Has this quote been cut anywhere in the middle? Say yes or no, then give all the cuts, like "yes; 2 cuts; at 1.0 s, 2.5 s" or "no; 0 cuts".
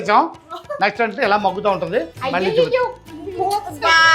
yes; 2 cuts; at 2.2 s, 3.1 s